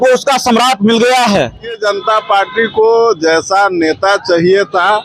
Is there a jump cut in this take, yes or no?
yes